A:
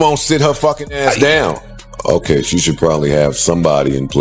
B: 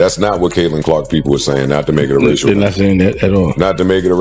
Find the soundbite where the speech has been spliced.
A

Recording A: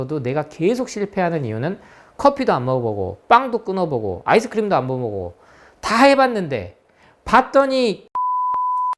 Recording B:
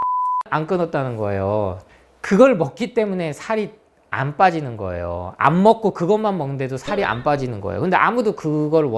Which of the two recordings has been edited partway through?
B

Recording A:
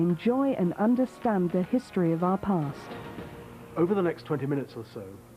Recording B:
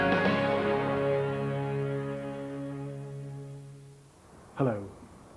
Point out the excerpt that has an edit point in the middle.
B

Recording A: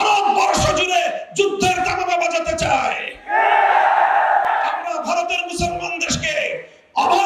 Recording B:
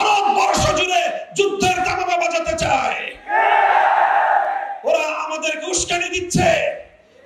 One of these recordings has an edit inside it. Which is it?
A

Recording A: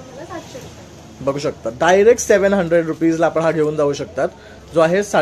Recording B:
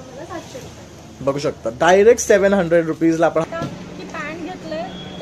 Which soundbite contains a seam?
B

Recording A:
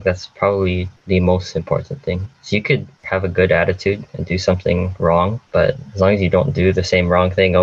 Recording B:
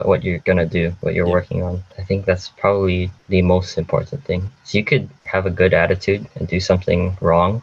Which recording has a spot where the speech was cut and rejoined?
B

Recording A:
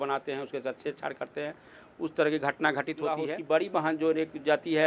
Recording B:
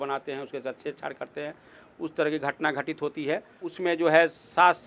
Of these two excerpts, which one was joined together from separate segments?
A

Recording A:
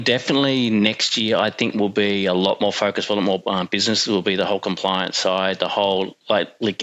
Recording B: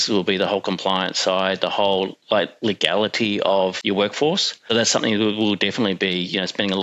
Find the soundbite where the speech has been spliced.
B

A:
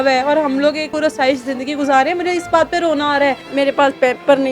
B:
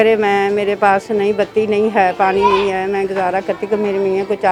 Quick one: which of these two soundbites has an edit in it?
A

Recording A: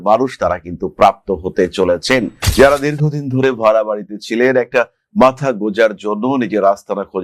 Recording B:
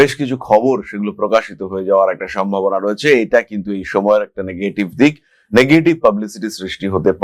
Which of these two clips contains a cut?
A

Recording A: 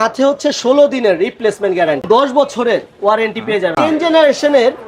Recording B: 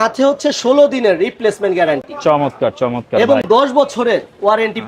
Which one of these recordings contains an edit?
A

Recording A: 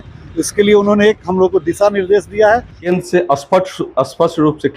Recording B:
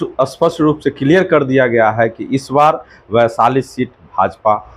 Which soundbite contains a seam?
A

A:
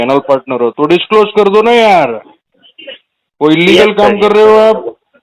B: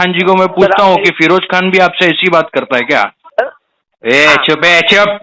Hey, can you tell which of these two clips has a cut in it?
B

